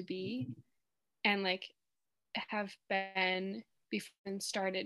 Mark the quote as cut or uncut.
uncut